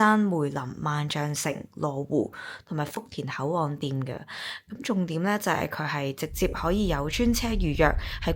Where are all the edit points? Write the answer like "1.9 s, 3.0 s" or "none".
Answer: none

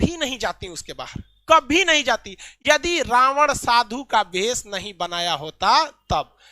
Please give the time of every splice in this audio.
none

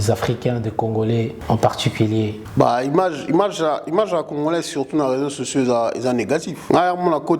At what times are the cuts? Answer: 1.4 s, 2.4 s, 6.5 s

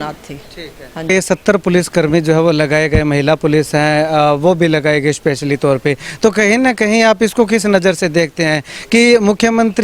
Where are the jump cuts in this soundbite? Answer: 1.1 s

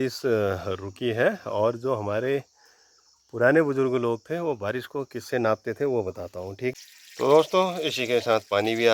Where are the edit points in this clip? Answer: 6.7 s

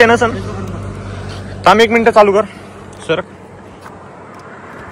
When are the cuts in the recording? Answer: none

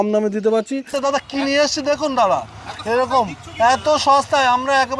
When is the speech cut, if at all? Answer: 0.9 s

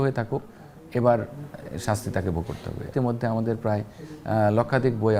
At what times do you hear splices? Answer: 2.9 s

